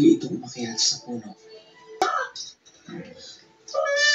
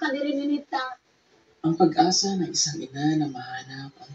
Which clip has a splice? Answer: first; 1 cut; at 2.1 s

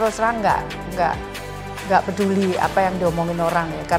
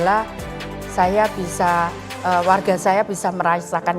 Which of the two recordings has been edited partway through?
second; 1 cut; at 2.1 s

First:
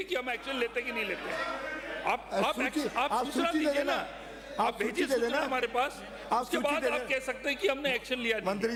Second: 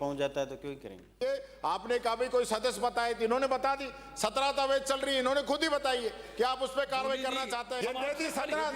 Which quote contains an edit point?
second; 2 cuts; at 1.1 s, 7.7 s

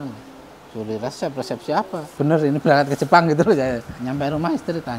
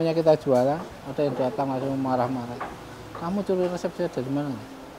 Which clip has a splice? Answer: first; 2 cuts; at 2.0 s, 3.9 s

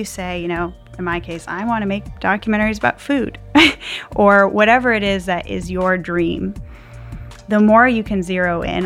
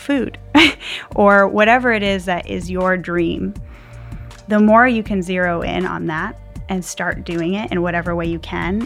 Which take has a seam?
first; 1 cut; at 2.1 s

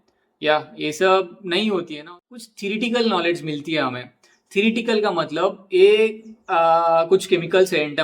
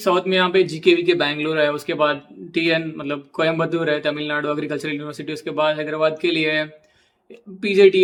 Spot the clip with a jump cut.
first; 1 cut; at 2.2 s

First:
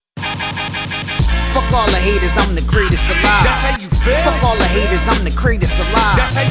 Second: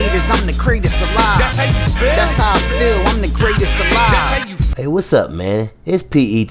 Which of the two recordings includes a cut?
second; 1 cut; at 4.6 s

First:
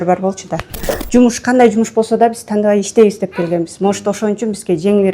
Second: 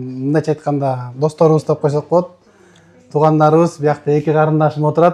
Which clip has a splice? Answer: first; 1 cut; at 0.9 s

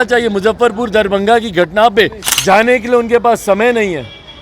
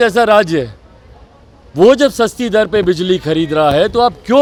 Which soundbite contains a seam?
first; 1 cut; at 2.3 s

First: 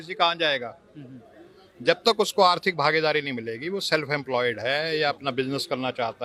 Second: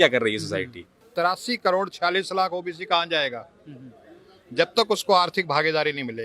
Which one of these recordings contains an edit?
second; 1 cut; at 1.0 s

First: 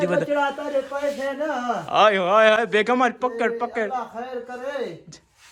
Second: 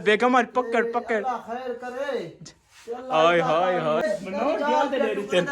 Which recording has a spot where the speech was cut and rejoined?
second; 1 cut; at 4.0 s

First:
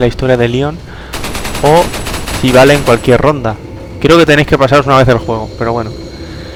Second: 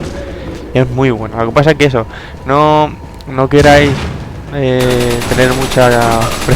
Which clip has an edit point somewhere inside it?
second; 1 cut; at 1.9 s

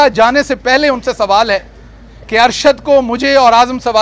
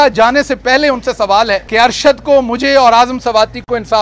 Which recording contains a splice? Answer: second; 1 cut; at 1.7 s

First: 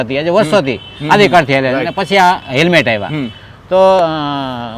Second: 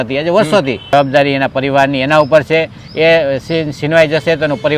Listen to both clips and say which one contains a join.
second; 1 cut; at 0.9 s

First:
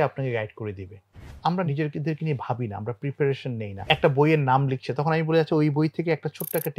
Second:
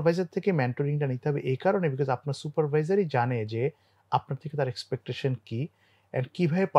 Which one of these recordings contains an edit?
first; 2 cuts; at 1.4 s, 3.9 s

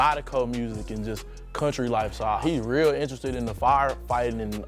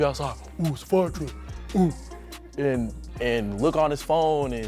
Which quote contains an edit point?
first; 1 cut; at 2.4 s

